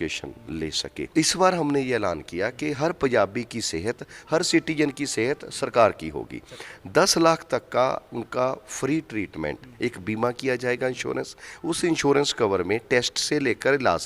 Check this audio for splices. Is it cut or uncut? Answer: cut